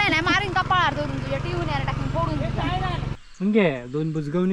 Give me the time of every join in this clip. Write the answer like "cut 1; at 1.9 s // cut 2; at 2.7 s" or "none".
cut 1; at 3.2 s